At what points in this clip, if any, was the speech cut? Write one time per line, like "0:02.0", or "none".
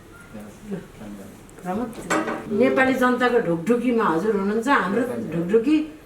0:02.4